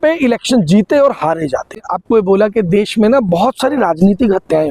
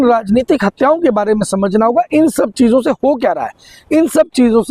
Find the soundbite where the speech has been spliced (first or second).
first